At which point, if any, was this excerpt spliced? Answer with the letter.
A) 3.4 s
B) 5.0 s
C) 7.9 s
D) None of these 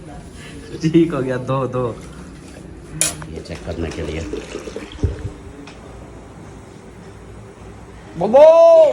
A